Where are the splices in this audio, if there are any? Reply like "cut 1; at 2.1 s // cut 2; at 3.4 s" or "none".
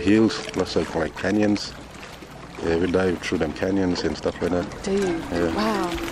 cut 1; at 1.1 s